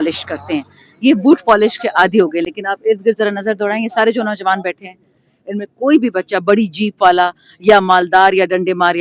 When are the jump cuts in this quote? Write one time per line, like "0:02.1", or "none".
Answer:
none